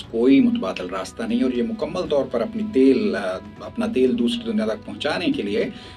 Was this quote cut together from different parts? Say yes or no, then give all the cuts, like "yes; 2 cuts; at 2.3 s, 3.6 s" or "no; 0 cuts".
no; 0 cuts